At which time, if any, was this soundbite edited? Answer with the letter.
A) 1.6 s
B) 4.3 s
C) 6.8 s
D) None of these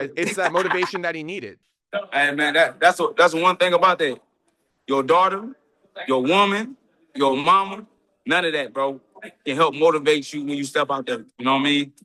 A